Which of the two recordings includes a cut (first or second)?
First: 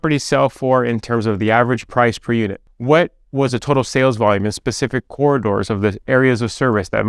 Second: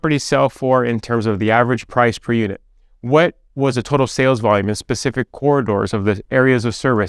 first